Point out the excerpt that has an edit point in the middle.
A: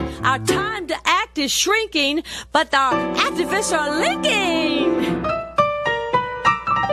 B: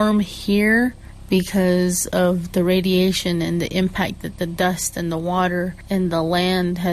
B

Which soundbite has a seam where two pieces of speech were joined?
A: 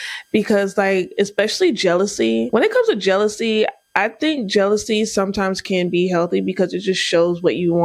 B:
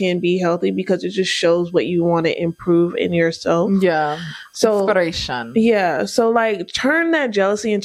A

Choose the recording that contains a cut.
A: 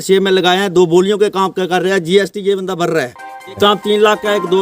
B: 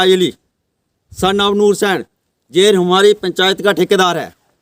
A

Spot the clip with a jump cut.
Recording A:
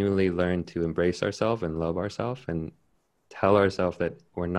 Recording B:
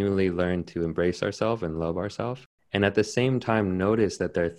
B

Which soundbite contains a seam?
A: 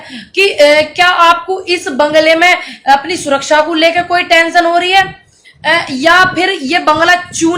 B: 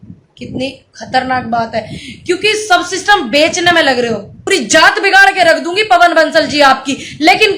B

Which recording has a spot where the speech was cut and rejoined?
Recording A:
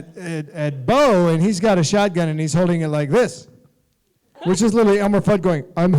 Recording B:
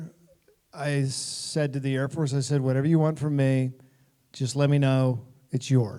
A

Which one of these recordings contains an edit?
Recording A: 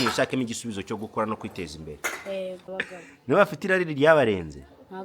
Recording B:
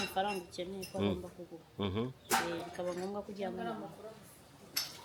A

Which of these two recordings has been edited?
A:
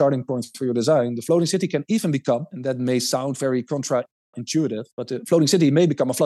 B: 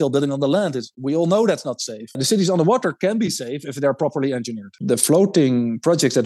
B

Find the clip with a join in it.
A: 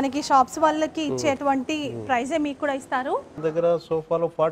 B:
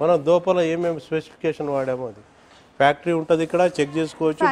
A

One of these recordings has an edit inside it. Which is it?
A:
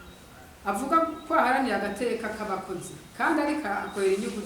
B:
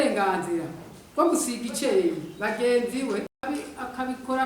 B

